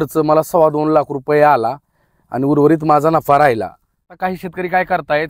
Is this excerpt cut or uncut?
cut